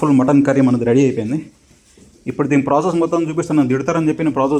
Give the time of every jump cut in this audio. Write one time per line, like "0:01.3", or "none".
none